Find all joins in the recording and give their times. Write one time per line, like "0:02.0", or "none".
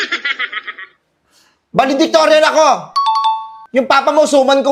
none